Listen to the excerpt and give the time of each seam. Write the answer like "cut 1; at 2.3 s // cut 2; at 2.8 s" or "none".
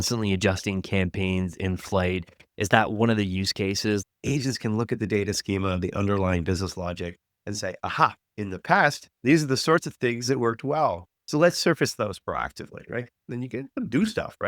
cut 1; at 4.0 s // cut 2; at 8.2 s // cut 3; at 11.1 s // cut 4; at 13.3 s